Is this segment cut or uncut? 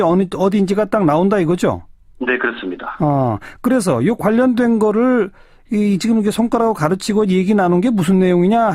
uncut